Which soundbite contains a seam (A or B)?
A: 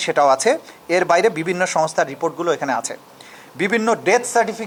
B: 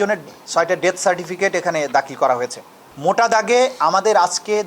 B